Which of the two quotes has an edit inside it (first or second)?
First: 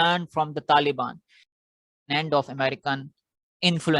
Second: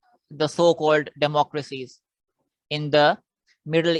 first